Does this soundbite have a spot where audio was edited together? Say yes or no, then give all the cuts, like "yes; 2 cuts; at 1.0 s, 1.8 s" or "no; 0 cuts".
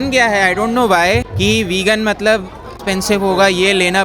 yes; 2 cuts; at 1.3 s, 2.7 s